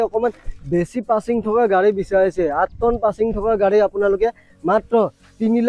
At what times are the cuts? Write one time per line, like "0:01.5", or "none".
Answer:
none